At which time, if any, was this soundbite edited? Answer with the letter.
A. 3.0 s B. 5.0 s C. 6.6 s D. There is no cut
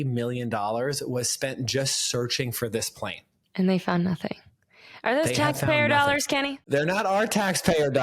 C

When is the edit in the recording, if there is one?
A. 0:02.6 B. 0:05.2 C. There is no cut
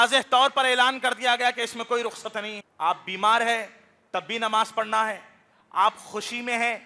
A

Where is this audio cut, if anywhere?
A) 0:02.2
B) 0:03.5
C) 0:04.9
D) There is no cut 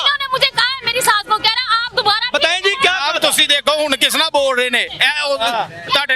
D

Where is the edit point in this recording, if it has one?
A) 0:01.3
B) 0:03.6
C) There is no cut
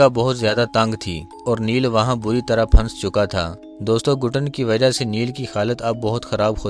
C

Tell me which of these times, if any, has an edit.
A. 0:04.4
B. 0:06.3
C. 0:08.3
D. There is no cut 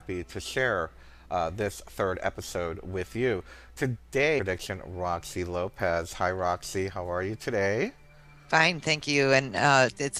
D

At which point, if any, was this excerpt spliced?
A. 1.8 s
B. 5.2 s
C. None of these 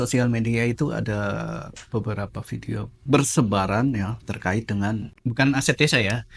B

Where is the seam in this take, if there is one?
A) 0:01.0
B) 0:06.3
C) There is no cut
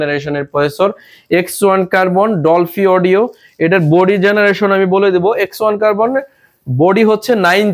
C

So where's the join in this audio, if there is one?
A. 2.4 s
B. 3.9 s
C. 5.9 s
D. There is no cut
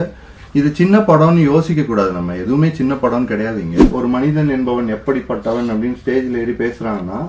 B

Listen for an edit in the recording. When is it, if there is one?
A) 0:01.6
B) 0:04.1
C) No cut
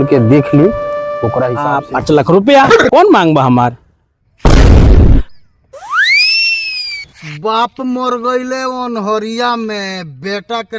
A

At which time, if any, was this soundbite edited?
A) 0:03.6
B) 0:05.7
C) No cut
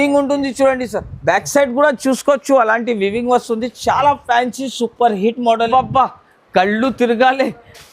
B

